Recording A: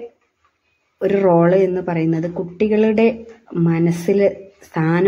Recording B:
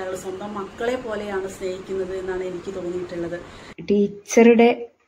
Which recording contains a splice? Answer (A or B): B